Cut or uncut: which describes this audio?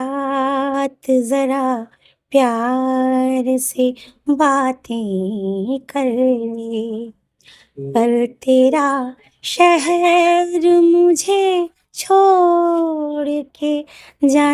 uncut